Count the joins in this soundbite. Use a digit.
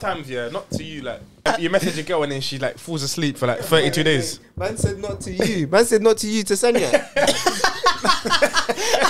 1